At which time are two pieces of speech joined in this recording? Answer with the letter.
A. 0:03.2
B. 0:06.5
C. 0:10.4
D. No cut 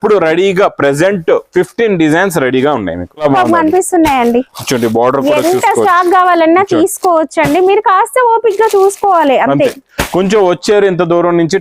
A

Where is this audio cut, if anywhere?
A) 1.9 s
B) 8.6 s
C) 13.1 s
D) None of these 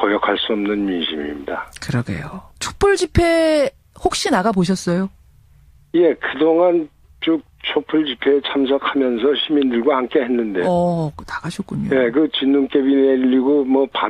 C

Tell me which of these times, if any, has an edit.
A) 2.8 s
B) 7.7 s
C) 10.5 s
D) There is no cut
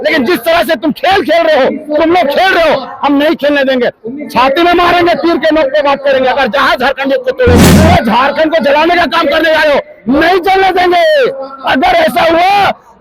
B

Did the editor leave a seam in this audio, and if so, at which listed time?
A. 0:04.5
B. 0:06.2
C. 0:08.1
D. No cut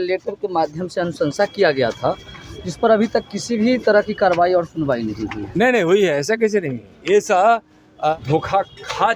C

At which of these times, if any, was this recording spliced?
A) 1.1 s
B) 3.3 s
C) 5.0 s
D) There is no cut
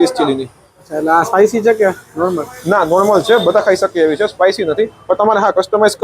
D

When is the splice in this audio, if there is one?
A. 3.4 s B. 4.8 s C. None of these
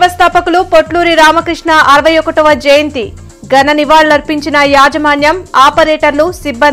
C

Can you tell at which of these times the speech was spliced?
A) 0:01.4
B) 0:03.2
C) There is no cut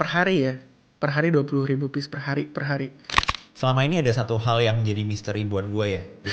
B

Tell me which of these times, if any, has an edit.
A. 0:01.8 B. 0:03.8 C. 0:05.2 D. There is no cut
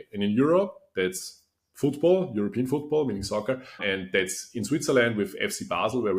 B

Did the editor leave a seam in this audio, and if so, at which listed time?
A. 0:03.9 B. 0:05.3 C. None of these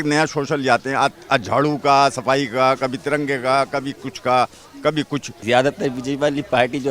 B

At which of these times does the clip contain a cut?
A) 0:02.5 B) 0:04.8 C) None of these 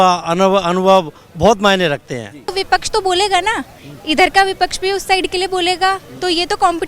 A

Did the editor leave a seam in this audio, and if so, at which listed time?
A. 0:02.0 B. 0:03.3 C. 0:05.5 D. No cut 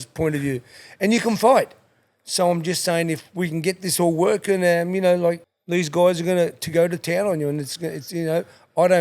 C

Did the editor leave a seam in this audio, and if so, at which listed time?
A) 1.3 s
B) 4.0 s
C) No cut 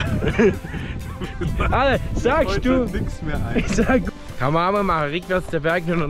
B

